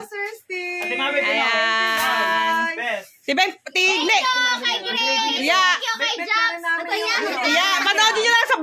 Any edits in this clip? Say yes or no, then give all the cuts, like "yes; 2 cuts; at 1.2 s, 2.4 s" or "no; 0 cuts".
no; 0 cuts